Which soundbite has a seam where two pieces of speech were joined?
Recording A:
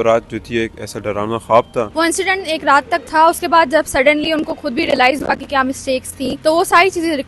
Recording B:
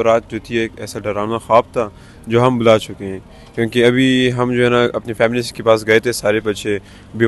A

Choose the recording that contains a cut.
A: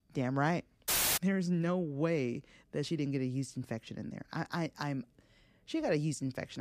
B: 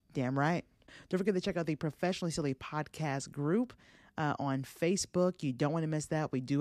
A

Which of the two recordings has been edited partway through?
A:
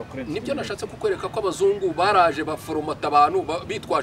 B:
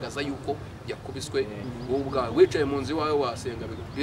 B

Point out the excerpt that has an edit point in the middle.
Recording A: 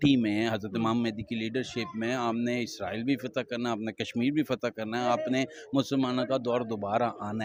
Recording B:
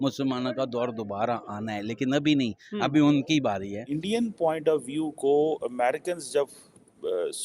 B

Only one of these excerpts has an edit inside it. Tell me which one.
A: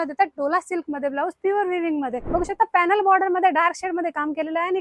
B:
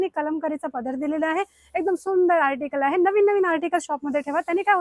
A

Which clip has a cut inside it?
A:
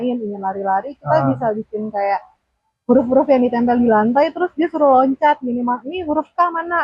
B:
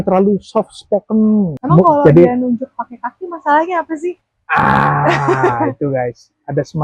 B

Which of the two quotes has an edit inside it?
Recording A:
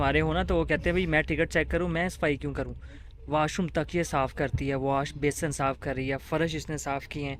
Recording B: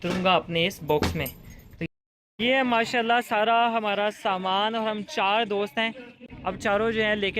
B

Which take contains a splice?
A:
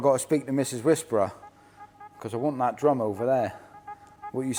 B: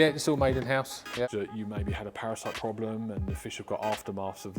B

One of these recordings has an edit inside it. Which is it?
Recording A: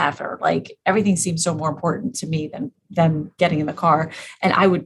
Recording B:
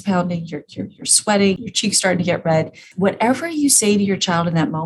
B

